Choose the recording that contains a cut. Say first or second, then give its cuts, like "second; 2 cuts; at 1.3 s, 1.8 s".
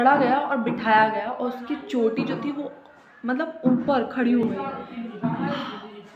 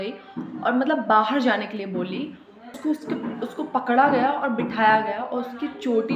second; 1 cut; at 2.7 s